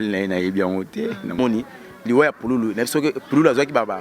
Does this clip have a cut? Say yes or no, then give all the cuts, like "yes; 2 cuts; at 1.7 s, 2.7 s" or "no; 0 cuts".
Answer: yes; 1 cut; at 1.4 s